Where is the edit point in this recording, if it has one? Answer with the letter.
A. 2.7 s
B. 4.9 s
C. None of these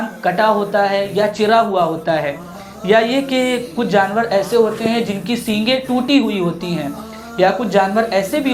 C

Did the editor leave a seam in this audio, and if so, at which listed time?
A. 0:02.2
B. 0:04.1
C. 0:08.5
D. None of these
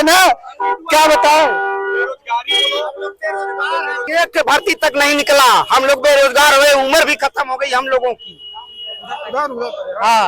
B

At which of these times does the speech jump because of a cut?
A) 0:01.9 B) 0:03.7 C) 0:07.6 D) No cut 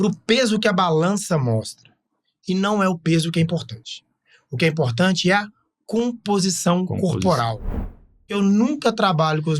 C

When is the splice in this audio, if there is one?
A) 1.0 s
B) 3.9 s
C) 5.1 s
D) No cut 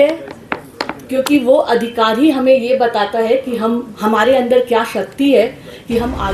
D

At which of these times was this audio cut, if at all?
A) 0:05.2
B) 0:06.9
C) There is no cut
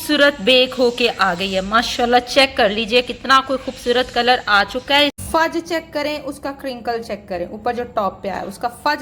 A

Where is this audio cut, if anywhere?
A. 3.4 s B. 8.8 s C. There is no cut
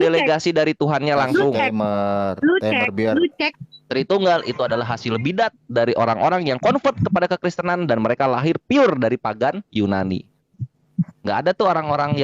A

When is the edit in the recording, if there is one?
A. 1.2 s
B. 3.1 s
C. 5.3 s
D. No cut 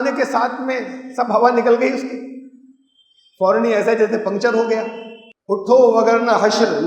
C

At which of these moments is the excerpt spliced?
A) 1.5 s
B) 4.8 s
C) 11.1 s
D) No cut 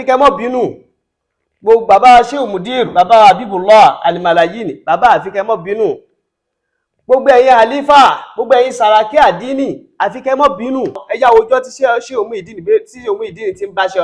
C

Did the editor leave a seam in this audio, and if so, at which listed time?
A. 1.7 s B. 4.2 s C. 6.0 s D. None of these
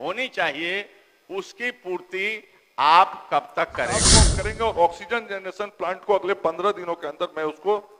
B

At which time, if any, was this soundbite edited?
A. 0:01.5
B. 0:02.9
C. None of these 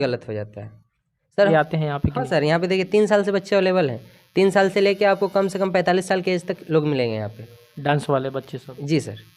A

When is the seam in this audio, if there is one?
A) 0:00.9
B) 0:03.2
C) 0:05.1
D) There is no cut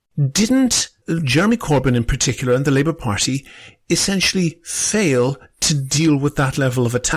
A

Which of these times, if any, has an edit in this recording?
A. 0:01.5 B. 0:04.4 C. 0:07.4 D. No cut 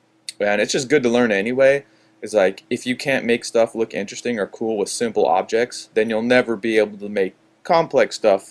C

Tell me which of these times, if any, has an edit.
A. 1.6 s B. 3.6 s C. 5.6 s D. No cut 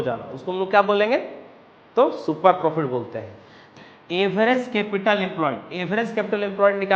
B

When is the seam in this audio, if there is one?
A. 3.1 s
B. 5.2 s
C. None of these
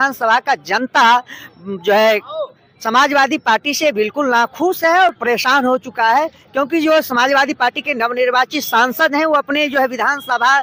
C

